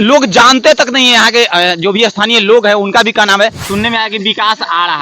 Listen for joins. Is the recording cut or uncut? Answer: cut